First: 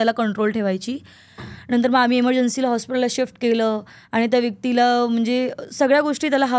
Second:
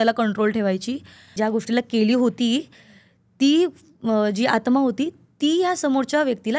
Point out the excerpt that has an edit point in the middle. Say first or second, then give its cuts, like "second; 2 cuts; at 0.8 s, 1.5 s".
second; 1 cut; at 1.3 s